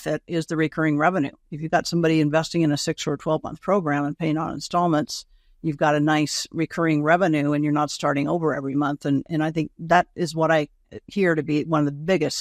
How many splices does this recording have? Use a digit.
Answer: 0